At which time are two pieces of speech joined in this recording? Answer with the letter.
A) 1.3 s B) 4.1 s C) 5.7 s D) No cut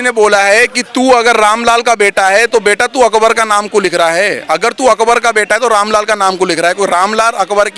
D